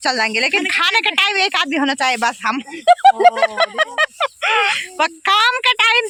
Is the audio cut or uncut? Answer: uncut